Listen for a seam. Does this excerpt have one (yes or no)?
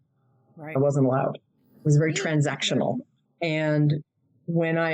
yes